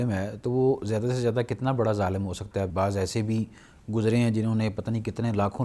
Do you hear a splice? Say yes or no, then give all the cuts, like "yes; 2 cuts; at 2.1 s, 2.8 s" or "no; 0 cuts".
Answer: yes; 1 cut; at 2.7 s